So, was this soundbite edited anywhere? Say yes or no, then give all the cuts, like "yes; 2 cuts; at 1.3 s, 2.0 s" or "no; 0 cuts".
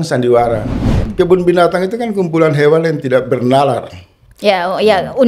yes; 1 cut; at 1.0 s